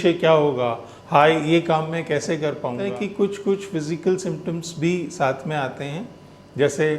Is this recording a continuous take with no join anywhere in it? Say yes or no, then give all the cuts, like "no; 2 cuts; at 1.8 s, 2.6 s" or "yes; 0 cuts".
no; 1 cut; at 2.8 s